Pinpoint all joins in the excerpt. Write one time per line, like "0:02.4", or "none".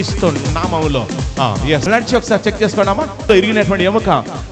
0:01.8
0:03.3

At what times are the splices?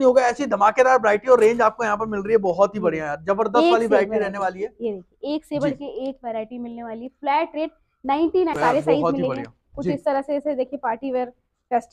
0:08.6

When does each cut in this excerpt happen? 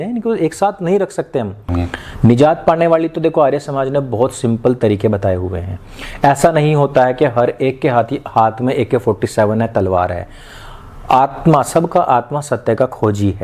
none

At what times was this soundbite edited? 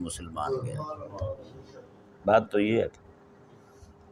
none

